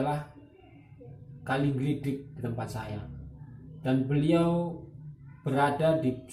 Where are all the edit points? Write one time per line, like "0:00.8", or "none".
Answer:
none